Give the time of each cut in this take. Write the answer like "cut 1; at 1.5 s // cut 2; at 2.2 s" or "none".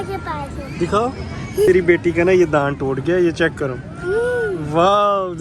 cut 1; at 1.7 s